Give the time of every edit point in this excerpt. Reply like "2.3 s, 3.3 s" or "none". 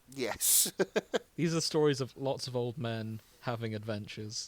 1.3 s

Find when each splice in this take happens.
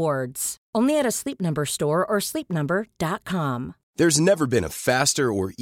3.8 s

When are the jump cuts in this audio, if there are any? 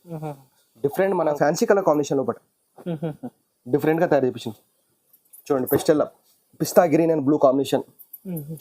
1.3 s

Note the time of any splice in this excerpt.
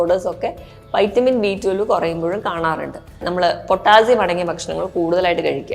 3.2 s

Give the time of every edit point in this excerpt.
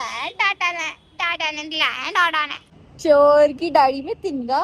2.6 s

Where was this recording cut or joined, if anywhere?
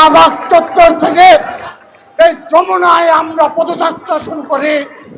none

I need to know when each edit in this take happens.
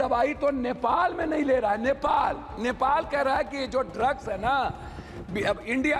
none

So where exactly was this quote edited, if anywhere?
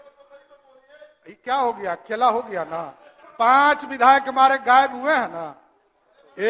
3.2 s

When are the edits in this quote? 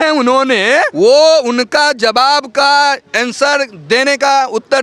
0.9 s

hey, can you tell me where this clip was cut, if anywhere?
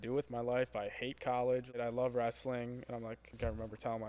1.7 s, 3.4 s

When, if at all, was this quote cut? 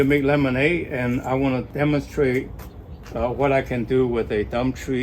1.7 s

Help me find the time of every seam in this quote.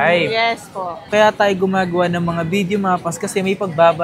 1.0 s

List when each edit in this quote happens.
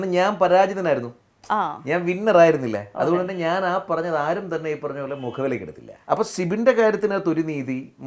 5.9 s

